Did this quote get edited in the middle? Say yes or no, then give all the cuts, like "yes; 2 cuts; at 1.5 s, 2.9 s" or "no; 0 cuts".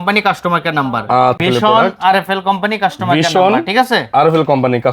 yes; 1 cut; at 1.4 s